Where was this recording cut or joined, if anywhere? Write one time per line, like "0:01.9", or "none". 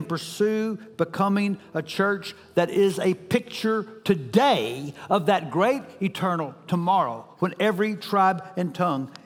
none